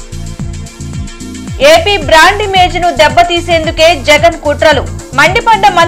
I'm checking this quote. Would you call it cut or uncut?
cut